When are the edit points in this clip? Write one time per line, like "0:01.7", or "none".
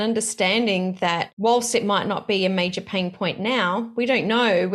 none